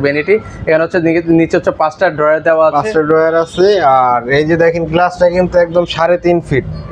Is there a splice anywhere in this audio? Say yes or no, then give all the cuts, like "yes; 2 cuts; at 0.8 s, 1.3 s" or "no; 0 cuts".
no; 0 cuts